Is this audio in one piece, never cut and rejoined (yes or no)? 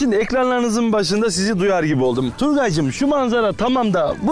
yes